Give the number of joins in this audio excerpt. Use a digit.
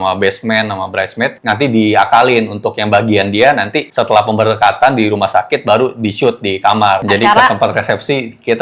1